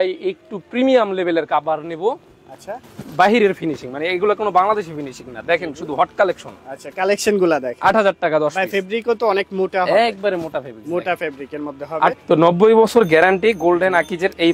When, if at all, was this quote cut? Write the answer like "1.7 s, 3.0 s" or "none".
12.2 s